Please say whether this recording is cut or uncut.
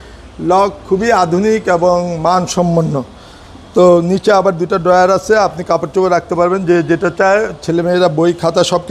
uncut